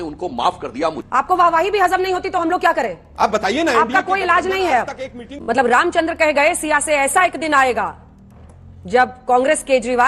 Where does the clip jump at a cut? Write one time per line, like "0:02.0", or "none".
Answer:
0:01.0
0:05.3

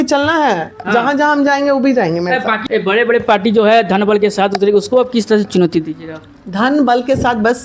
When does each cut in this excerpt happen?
0:02.6

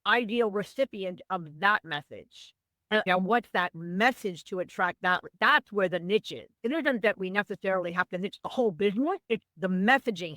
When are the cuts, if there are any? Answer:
0:09.5

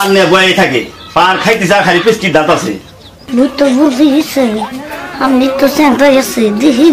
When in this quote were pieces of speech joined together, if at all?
0:03.2

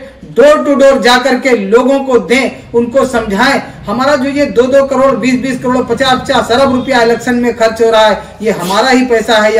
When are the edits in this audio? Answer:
none

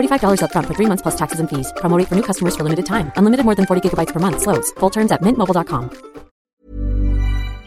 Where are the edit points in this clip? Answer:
0:06.4

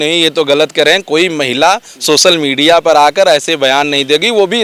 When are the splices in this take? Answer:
none

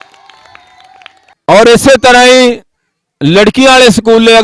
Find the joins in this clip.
0:01.3

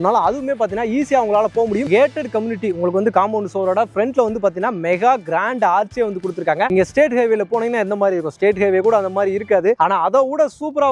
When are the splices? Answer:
0:01.9
0:06.7

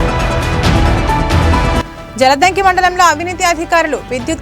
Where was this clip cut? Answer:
0:01.9

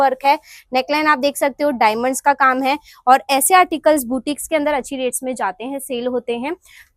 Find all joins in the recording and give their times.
none

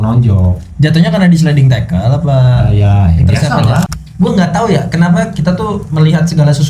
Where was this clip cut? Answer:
0:04.0

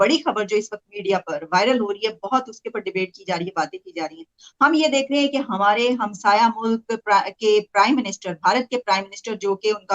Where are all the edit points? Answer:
none

